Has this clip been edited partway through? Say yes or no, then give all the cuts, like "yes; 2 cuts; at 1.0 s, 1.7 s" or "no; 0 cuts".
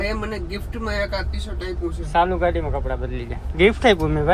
no; 0 cuts